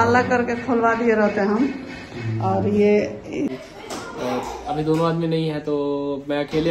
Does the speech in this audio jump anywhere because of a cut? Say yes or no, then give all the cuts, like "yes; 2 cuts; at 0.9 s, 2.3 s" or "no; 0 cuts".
yes; 1 cut; at 3.6 s